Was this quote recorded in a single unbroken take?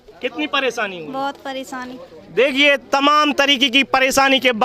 yes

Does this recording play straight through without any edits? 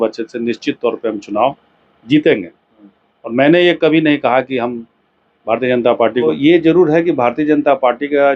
no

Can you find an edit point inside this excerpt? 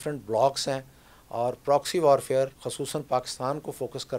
yes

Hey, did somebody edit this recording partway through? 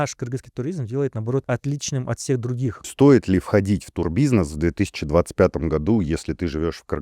yes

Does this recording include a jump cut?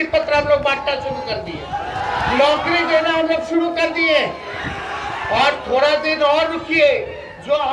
no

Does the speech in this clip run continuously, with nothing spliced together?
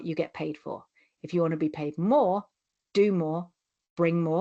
yes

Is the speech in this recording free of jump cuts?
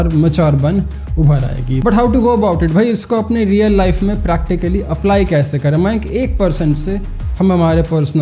yes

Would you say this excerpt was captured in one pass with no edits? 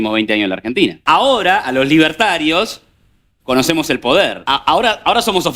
no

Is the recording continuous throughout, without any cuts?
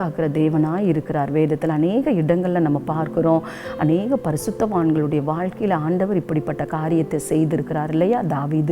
yes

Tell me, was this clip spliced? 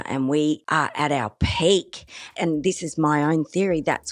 yes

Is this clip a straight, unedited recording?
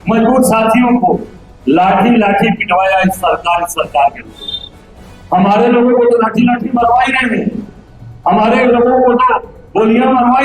yes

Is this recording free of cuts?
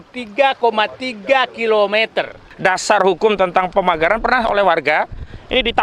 no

